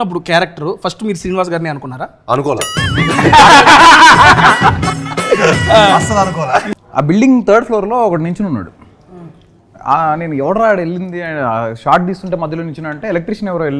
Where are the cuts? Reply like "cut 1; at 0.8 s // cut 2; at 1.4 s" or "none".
cut 1; at 6.7 s